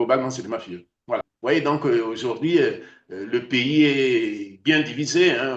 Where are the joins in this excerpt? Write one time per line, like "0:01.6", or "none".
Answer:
0:01.3